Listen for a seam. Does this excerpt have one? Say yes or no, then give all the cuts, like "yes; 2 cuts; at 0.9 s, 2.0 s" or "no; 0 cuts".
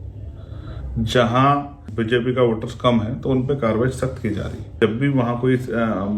yes; 2 cuts; at 1.8 s, 4.7 s